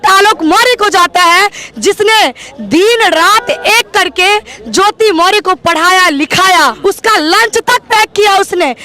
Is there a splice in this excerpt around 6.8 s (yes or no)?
yes